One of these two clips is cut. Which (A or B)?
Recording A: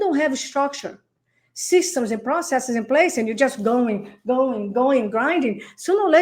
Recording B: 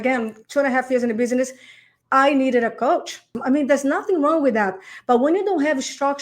B